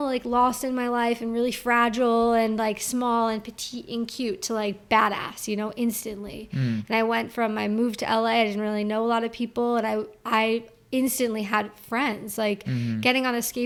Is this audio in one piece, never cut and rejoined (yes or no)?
yes